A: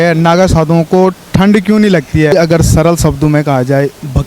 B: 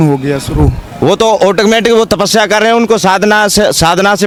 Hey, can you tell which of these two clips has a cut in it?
A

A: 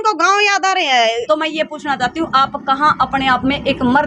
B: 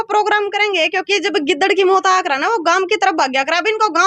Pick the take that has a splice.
A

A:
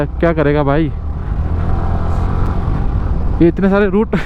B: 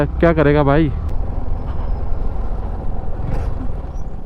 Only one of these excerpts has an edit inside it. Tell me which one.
B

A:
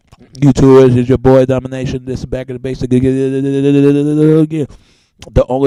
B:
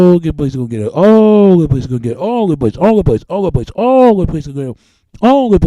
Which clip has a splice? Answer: B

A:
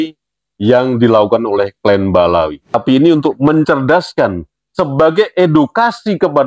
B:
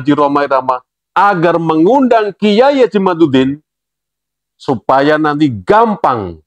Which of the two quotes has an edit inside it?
A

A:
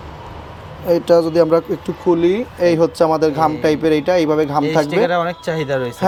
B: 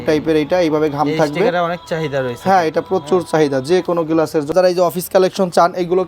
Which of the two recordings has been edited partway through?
B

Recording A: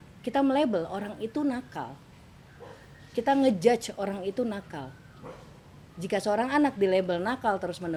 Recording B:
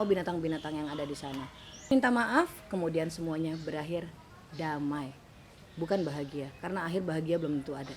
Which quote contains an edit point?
B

